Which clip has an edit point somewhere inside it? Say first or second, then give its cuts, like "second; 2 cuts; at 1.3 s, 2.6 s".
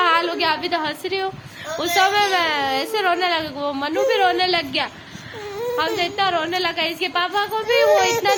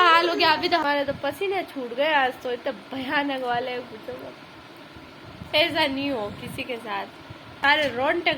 second; 3 cuts; at 0.8 s, 5.5 s, 7.5 s